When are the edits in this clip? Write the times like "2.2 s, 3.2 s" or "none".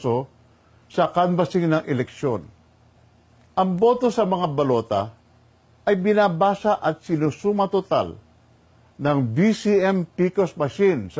8.2 s